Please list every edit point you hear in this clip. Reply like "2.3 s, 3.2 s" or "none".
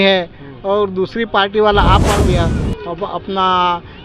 2.3 s